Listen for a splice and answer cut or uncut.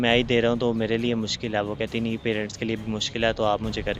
uncut